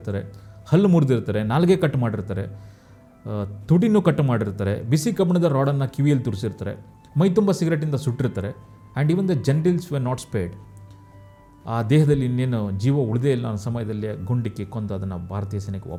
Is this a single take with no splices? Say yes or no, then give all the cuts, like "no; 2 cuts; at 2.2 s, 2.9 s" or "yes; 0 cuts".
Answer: yes; 0 cuts